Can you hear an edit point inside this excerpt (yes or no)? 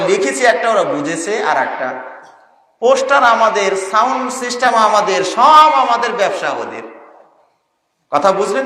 no